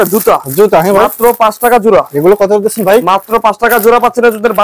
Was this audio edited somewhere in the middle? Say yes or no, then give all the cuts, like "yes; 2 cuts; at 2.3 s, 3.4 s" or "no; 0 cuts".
no; 0 cuts